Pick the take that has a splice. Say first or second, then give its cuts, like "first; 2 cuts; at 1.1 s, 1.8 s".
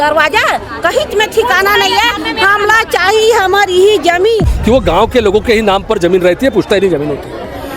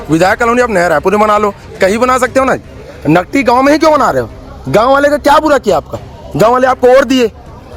first; 1 cut; at 4.5 s